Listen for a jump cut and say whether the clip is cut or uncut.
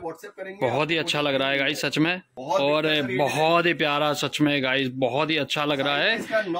cut